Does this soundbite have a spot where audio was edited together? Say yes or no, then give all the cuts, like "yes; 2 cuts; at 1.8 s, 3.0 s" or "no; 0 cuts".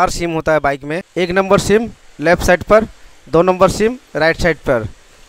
yes; 1 cut; at 1.0 s